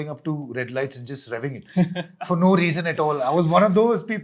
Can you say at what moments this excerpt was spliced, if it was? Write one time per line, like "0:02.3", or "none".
none